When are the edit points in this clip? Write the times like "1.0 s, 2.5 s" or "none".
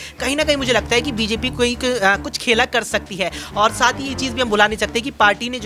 none

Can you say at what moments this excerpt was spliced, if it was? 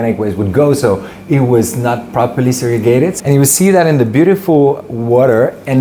3.1 s

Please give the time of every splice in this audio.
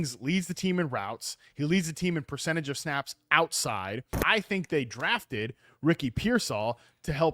4.1 s

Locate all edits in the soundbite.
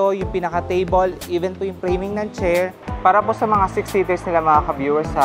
2.8 s

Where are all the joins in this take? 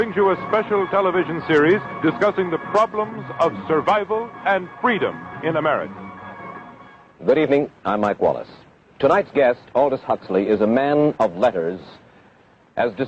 1.9 s

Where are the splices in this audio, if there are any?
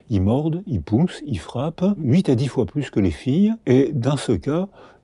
2.0 s, 3.6 s

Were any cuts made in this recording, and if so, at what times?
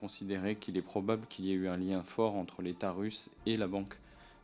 none

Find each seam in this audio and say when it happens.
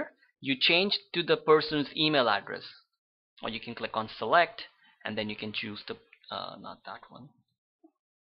6.6 s

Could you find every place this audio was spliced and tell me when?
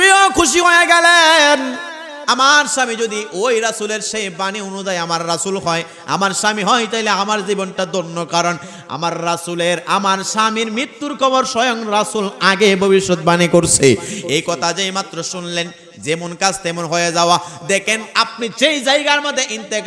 none

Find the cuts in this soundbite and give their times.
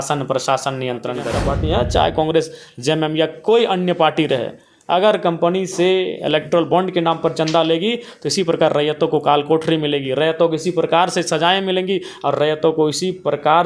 1.4 s

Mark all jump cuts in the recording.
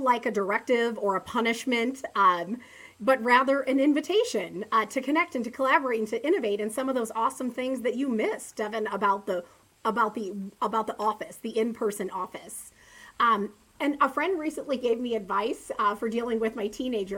none

